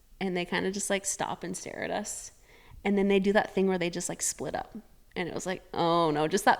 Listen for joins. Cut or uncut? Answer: uncut